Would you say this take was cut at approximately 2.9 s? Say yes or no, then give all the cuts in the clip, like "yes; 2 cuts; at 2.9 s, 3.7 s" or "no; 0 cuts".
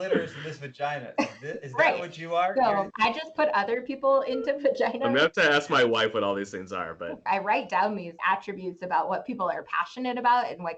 yes; 2 cuts; at 2.9 s, 7.2 s